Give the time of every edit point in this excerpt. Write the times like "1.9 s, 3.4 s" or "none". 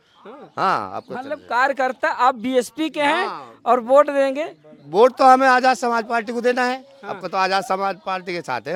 none

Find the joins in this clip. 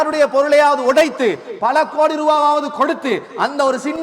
none

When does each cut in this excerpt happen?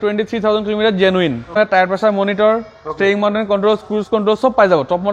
1.5 s

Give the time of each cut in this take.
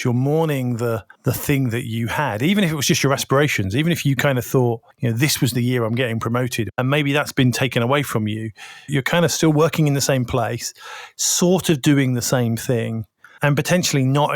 1.1 s, 4.9 s, 6.7 s, 8.9 s, 13.4 s

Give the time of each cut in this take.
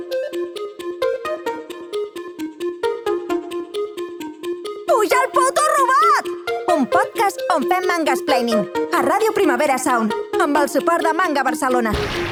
none

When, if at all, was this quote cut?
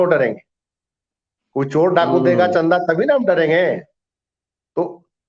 none

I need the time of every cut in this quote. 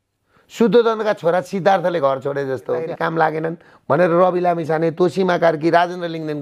2.8 s

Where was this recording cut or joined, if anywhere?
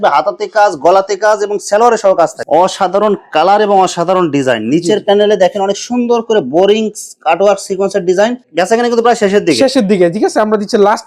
2.4 s, 8.4 s

